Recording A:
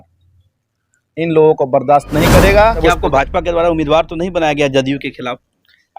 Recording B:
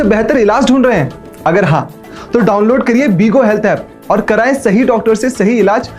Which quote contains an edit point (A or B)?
A